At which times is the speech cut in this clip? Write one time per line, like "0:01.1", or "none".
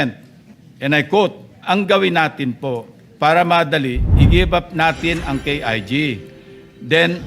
0:01.5